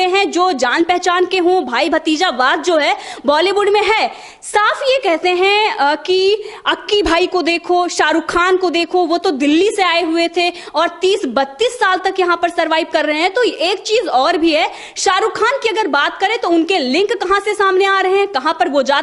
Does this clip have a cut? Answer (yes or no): no